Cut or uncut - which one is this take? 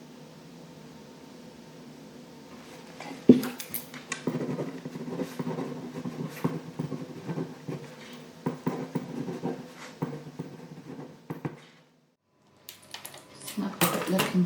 cut